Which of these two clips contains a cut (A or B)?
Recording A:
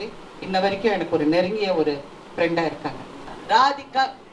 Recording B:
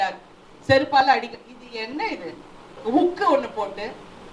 A